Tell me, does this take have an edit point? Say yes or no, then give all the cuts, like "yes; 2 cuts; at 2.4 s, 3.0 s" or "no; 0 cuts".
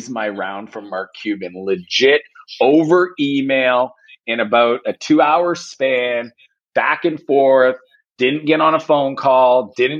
no; 0 cuts